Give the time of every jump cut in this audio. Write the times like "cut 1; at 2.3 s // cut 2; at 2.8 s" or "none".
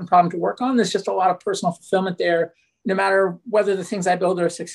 cut 1; at 2.7 s